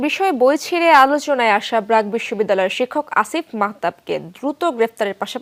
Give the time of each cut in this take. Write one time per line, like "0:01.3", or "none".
none